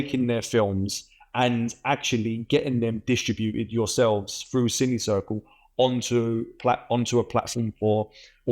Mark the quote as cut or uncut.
uncut